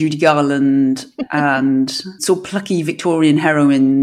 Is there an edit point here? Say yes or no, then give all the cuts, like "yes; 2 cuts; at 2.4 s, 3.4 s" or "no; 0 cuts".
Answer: yes; 2 cuts; at 1.2 s, 2.1 s